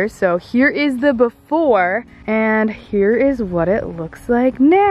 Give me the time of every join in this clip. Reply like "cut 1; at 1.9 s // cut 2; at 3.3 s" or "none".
cut 1; at 2.1 s

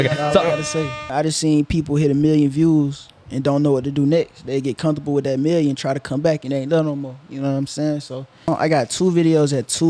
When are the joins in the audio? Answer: cut 1; at 1.0 s // cut 2; at 8.5 s

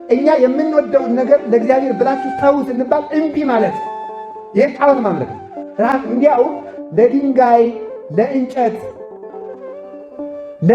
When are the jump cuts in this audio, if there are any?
none

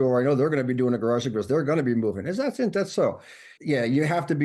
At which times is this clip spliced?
none

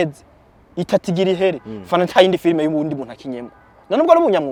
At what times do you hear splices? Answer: none

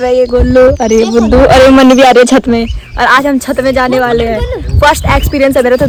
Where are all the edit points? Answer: none

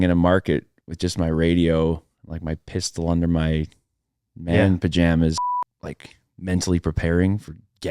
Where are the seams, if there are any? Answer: cut 1; at 5.4 s

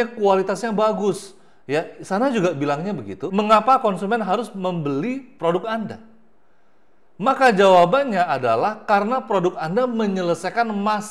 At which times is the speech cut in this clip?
none

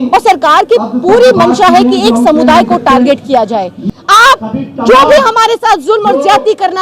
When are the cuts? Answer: cut 1; at 3.8 s

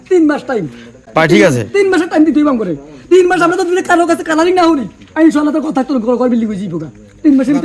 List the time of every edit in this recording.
none

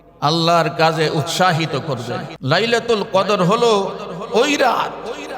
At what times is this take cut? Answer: cut 1; at 2.3 s

